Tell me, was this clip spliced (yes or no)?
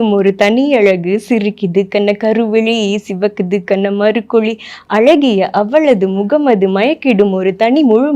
yes